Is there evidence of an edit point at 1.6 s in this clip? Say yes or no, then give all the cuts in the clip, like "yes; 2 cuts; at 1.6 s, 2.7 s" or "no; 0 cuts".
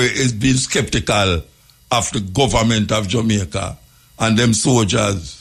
no; 0 cuts